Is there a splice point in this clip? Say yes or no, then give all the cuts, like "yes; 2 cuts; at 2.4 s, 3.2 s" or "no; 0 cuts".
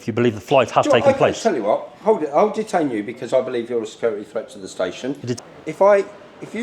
yes; 1 cut; at 5.4 s